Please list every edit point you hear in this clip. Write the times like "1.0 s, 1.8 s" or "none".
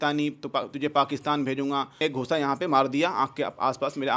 2.0 s

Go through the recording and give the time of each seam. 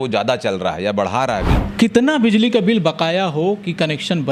1.6 s

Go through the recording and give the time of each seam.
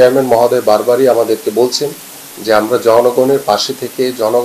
none

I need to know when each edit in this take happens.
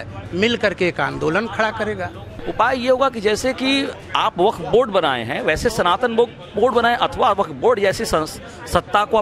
2.4 s

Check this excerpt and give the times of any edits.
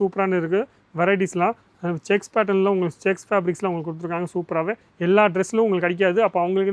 4.9 s

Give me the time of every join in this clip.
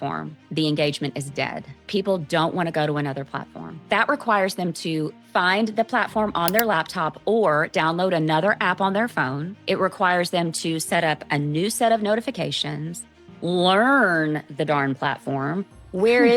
1.8 s, 3.8 s, 5.2 s, 9.5 s

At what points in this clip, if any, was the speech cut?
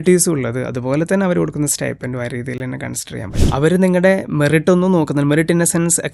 3.3 s

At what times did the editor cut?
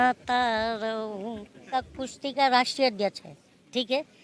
1.6 s

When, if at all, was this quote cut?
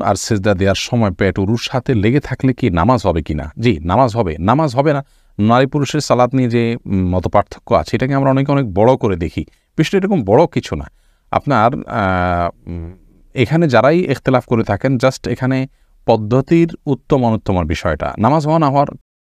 none

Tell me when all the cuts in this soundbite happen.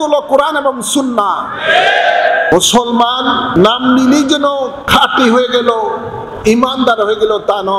2.5 s, 3.6 s, 4.8 s

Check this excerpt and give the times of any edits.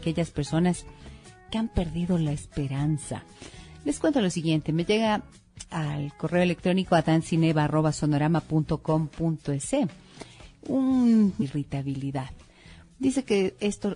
none

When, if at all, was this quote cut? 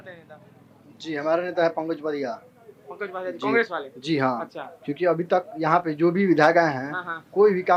none

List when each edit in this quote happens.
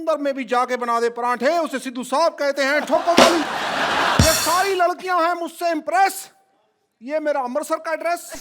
4.2 s

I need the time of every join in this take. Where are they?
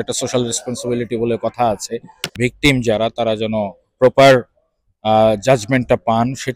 2.5 s

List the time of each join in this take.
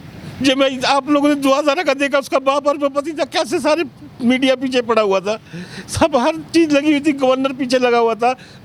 none

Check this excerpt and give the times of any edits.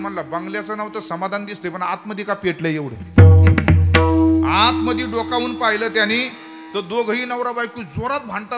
none

